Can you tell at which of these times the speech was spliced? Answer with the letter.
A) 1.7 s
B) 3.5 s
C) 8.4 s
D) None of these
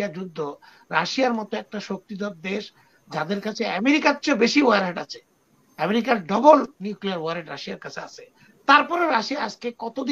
D